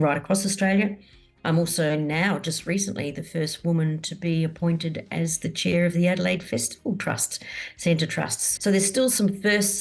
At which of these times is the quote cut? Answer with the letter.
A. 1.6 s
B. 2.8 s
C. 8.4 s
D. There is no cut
C